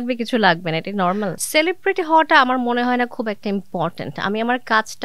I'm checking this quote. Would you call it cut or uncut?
cut